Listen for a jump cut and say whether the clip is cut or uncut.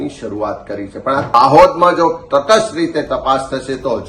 cut